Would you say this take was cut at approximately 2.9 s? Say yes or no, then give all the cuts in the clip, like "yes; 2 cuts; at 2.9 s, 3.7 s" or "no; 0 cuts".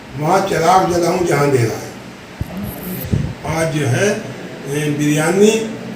yes; 1 cut; at 2.9 s